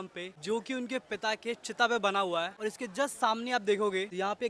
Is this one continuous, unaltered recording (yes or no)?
yes